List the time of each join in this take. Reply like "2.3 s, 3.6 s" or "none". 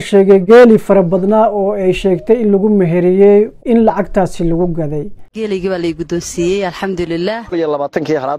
5.2 s